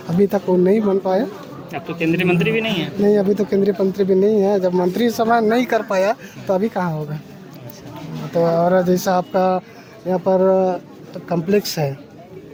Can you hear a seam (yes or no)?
no